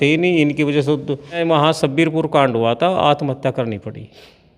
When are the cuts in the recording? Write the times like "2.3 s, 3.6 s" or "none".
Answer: 1.4 s